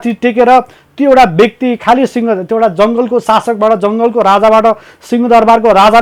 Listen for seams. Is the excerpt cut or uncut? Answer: uncut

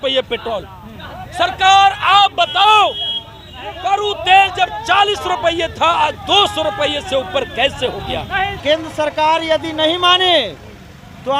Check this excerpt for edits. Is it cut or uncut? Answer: cut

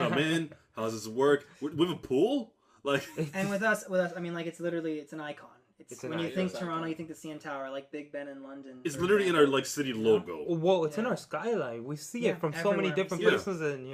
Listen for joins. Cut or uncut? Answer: uncut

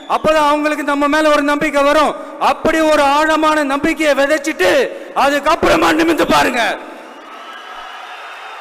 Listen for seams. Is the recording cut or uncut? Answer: uncut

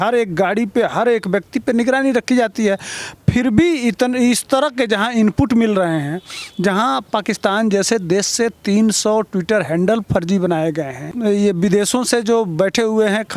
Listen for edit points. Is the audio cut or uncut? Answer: uncut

